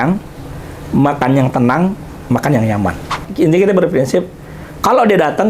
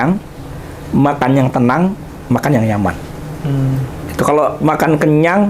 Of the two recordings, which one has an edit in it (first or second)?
first